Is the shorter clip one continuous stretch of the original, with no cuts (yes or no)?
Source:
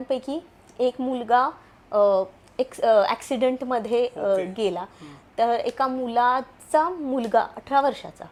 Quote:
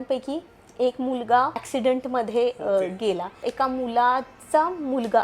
no